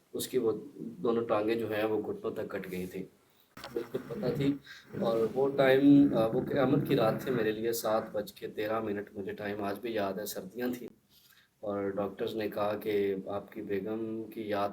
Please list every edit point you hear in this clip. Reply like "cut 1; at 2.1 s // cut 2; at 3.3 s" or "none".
cut 1; at 3.5 s

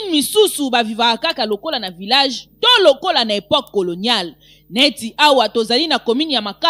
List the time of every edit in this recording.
none

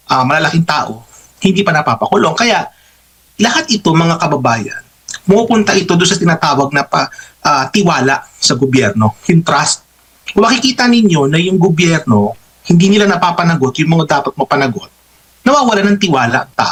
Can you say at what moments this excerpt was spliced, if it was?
none

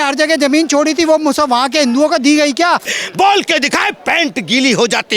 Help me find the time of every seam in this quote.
cut 1; at 3.0 s

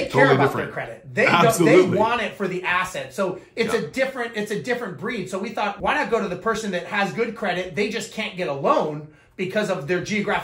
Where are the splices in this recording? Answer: cut 1; at 5.8 s

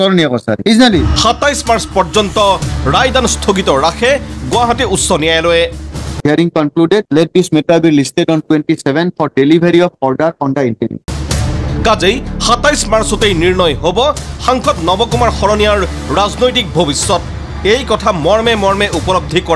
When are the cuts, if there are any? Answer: cut 1; at 1.1 s

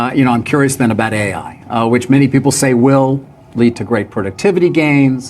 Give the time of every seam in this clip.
none

